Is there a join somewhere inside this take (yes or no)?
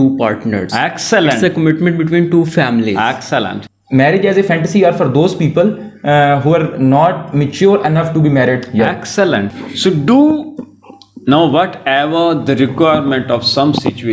yes